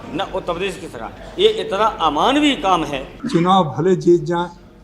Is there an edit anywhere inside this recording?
yes; 1 cut; at 3.1 s

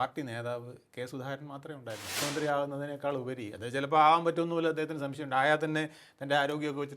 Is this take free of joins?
no; 1 cut; at 2.1 s

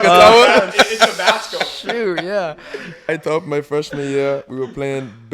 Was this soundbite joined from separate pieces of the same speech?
yes; 1 cut; at 3.1 s

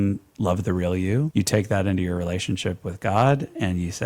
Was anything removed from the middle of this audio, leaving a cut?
yes; 1 cut; at 1.3 s

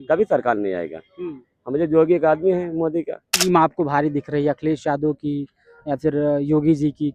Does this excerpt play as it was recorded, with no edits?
no; 1 cut; at 3.4 s

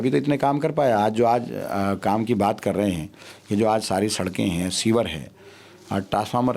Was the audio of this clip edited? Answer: no; 0 cuts

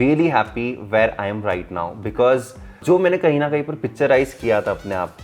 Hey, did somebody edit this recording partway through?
yes; 1 cut; at 2.8 s

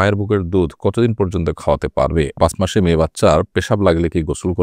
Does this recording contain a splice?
yes; 1 cut; at 2.4 s

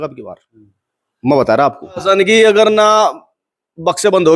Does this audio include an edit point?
yes; 1 cut; at 2.0 s

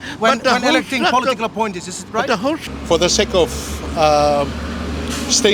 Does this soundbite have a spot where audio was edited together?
yes; 1 cut; at 2.6 s

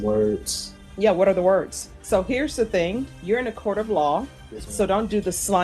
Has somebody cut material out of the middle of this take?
yes; 2 cuts; at 1.9 s, 3.1 s

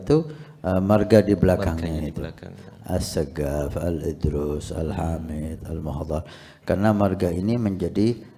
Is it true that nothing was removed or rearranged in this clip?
yes; 0 cuts

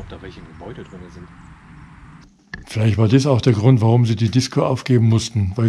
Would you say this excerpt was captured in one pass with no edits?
no; 1 cut; at 2.2 s

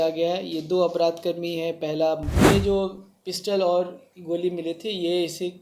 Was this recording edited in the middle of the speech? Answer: yes; 1 cut; at 2.3 s

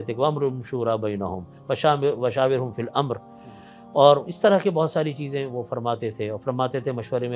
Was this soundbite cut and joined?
no; 0 cuts

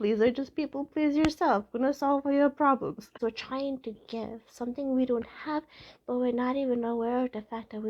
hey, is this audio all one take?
no; 1 cut; at 3.2 s

